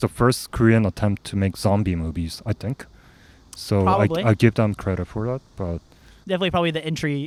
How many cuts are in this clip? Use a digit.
0